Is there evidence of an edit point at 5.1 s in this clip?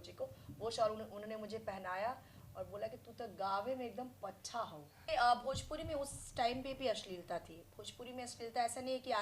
yes; 1 cut; at 5.1 s

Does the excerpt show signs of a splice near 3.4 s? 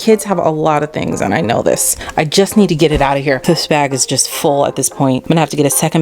yes; 3 cuts; at 2.0 s, 3.4 s, 5.2 s

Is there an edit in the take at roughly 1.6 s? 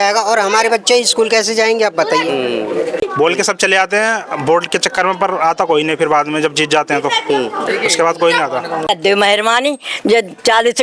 no; 2 cuts; at 3.0 s, 8.9 s

